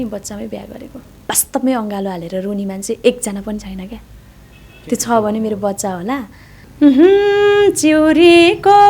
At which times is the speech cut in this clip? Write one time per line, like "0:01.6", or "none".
0:01.1
0:06.7